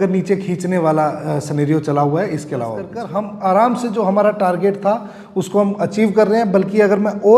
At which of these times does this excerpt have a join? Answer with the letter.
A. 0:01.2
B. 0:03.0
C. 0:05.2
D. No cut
B